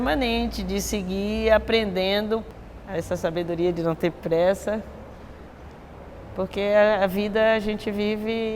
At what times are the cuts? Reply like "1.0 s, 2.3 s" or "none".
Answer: 2.5 s